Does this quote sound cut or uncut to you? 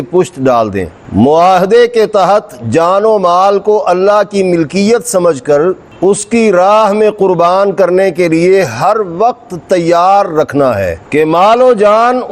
cut